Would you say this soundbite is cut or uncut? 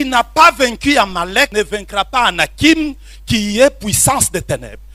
cut